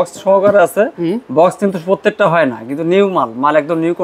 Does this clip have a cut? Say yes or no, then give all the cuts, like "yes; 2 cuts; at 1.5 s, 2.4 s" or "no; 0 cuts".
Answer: no; 0 cuts